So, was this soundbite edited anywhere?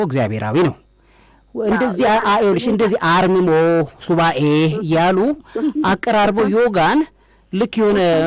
no; 0 cuts

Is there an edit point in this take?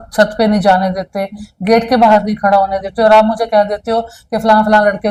no; 0 cuts

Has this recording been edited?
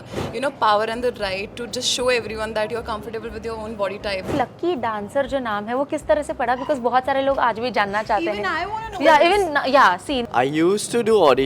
yes; 2 cuts; at 4.3 s, 10.1 s

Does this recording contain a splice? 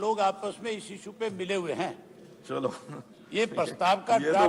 no; 0 cuts

